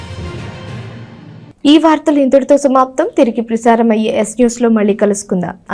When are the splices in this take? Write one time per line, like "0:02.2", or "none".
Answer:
none